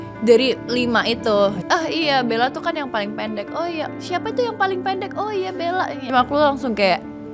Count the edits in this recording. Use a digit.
3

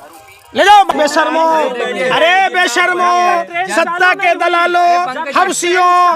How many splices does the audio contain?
1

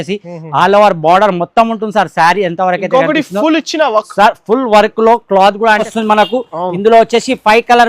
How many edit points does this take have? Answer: 1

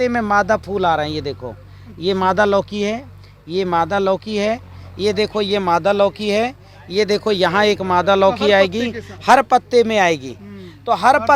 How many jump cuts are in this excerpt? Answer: 0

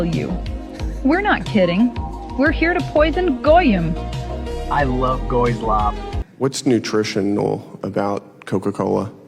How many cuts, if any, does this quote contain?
1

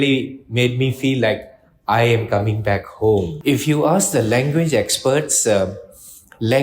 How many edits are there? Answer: 1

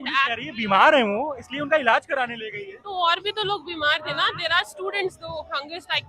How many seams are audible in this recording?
0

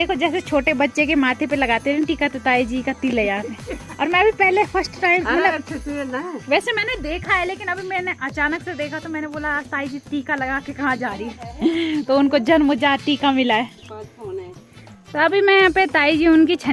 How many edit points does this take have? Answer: 0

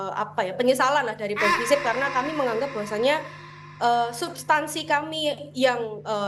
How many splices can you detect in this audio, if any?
0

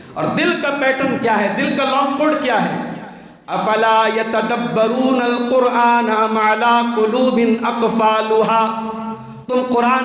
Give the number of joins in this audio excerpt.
0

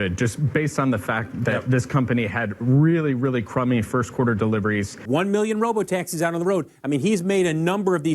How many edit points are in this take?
1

